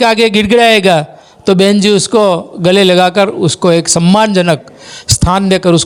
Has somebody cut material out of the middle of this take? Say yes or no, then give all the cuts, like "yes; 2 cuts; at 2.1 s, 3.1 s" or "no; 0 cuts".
no; 0 cuts